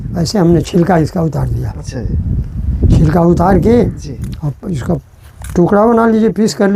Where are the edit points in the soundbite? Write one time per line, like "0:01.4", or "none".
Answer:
none